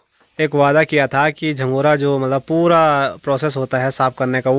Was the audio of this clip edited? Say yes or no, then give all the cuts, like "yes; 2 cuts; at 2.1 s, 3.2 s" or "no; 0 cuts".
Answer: no; 0 cuts